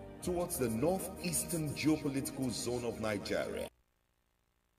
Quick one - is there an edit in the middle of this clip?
yes; 1 cut; at 3.6 s

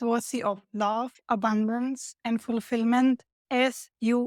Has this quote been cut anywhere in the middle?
no; 0 cuts

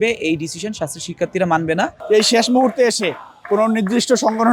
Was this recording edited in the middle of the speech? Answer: yes; 1 cut; at 2.0 s

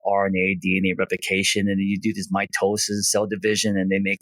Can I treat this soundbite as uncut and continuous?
yes; 0 cuts

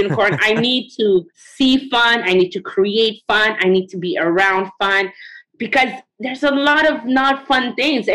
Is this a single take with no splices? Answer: no; 1 cut; at 6.0 s

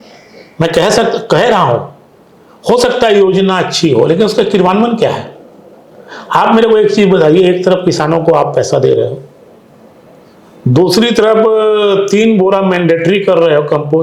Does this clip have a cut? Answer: no; 0 cuts

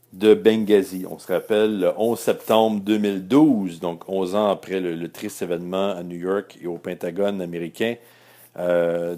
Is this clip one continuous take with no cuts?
yes; 0 cuts

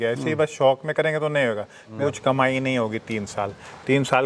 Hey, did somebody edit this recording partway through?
yes; 1 cut; at 1.9 s

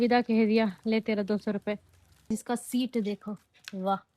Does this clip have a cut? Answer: yes; 1 cut; at 2.3 s

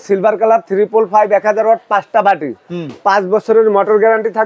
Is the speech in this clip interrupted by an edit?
no; 0 cuts

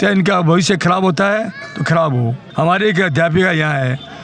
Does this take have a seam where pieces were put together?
yes; 1 cut; at 2.4 s

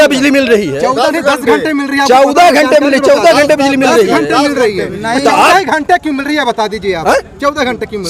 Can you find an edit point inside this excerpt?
no; 0 cuts

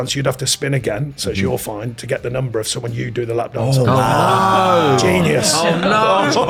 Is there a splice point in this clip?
no; 0 cuts

